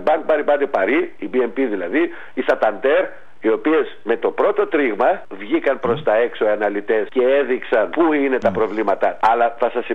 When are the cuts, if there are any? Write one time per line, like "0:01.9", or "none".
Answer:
0:01.2
0:03.2
0:05.3
0:07.1
0:07.9
0:09.2

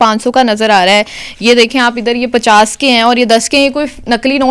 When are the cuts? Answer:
none

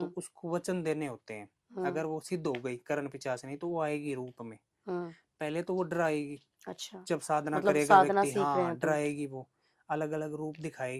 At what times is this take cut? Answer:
none

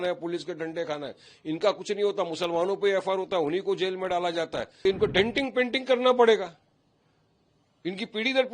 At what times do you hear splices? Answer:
0:04.8

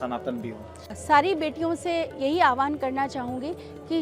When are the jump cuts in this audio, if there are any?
0:00.9

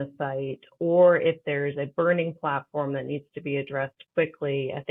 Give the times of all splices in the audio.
none

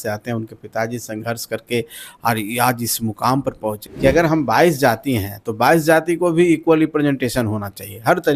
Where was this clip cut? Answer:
0:03.8

